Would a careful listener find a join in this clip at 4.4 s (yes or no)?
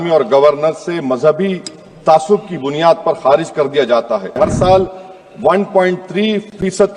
yes